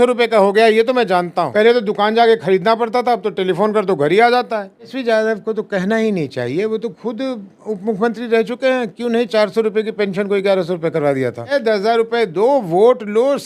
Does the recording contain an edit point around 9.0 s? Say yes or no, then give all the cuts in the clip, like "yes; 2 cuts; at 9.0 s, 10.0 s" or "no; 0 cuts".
no; 3 cuts; at 1.4 s, 4.9 s, 11.6 s